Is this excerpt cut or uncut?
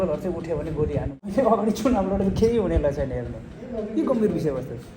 cut